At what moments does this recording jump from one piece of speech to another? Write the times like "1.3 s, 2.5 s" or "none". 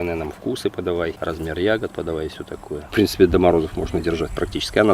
1.2 s, 2.8 s